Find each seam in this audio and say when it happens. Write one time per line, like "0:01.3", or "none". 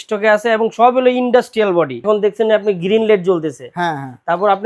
0:02.0